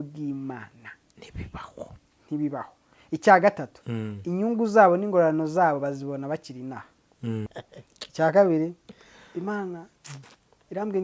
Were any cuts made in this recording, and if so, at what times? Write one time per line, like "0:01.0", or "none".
0:07.5